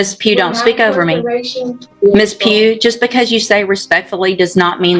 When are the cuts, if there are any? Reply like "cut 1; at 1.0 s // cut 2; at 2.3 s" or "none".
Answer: cut 1; at 1.9 s